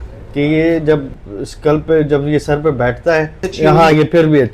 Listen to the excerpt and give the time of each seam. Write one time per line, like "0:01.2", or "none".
0:03.5